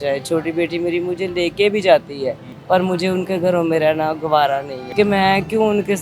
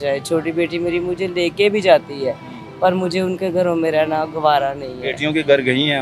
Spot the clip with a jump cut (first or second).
first